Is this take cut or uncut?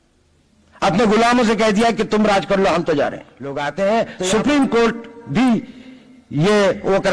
cut